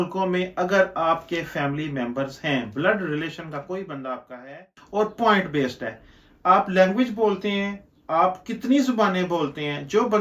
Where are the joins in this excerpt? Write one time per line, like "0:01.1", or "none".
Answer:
0:04.7